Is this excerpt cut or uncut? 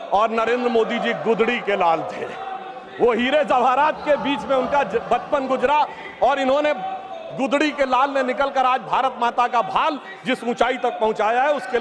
uncut